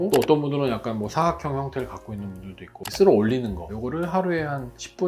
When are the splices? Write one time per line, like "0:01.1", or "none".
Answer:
0:02.9